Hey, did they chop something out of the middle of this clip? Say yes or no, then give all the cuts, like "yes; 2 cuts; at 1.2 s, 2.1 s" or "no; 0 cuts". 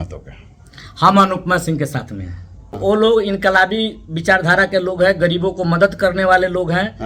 yes; 1 cut; at 2.8 s